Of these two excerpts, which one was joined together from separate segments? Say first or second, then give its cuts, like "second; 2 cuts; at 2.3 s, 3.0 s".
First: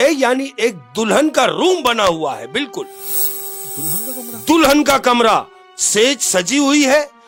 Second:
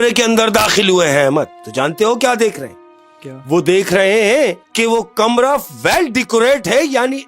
second; 2 cuts; at 1.6 s, 4.7 s